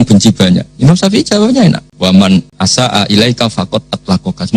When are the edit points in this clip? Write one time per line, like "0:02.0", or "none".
0:01.9
0:02.5